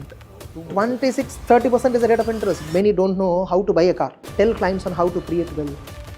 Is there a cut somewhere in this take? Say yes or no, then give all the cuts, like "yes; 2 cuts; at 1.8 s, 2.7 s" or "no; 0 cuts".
yes; 2 cuts; at 2.6 s, 4.3 s